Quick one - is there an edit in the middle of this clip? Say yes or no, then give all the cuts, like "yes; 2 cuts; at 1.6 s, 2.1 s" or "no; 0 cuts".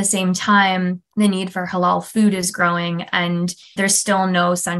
yes; 2 cuts; at 1.0 s, 3.8 s